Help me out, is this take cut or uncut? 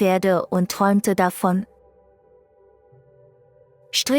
uncut